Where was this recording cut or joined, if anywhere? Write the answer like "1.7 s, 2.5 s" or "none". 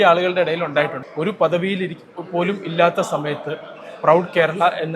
1.0 s